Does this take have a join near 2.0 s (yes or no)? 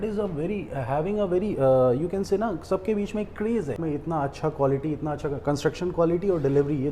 no